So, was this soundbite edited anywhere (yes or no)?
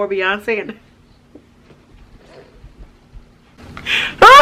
no